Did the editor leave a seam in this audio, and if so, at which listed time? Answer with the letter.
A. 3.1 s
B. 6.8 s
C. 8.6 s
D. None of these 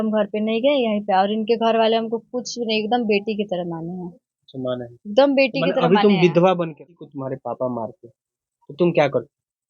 B